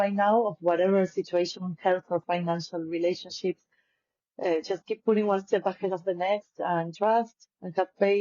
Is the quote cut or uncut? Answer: uncut